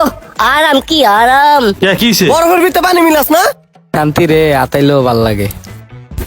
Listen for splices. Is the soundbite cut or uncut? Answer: cut